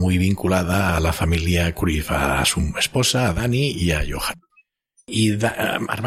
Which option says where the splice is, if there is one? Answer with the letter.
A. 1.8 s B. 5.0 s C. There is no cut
C